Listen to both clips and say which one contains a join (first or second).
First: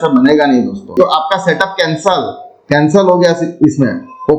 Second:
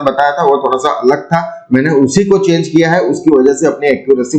first